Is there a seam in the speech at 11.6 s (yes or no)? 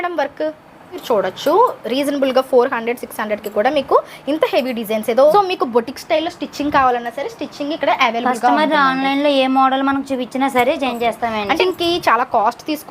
yes